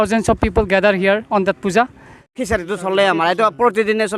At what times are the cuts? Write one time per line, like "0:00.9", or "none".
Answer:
0:02.4